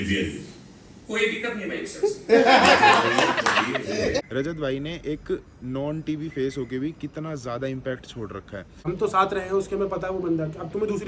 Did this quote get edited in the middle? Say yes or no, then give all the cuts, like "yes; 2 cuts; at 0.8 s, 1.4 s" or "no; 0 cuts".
yes; 2 cuts; at 4.2 s, 8.8 s